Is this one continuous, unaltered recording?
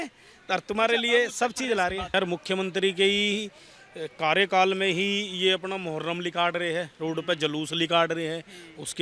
no; 1 cut; at 2.1 s

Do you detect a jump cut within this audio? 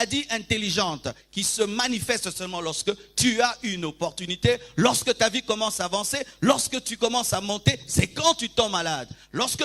no; 0 cuts

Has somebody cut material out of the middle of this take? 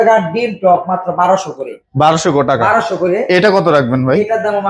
no; 0 cuts

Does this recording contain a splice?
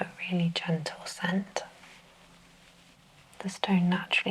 yes; 1 cut; at 3.0 s

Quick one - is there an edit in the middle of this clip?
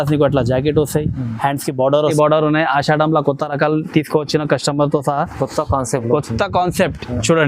yes; 1 cut; at 2.1 s

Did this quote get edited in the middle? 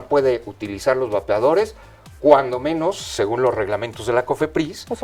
no; 0 cuts

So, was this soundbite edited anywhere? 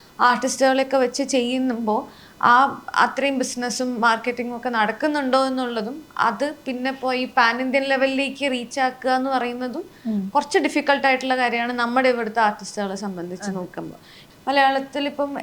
yes; 1 cut; at 14.2 s

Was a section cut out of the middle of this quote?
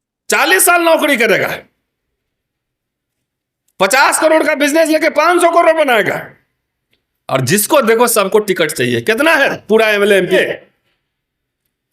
yes; 1 cut; at 10.4 s

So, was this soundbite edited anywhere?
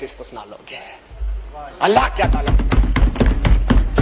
no; 0 cuts

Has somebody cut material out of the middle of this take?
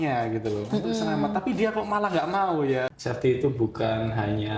yes; 1 cut; at 2.9 s

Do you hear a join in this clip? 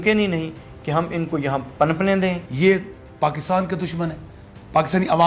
yes; 1 cut; at 2.5 s

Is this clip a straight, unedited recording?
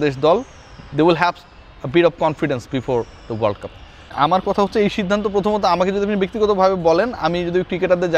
yes; 0 cuts

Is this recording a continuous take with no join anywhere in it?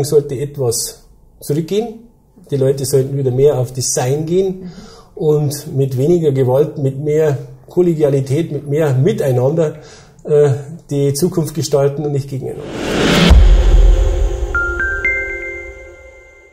no; 1 cut; at 12.6 s

